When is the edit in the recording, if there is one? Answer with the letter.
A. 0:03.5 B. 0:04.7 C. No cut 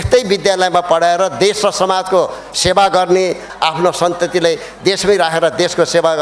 A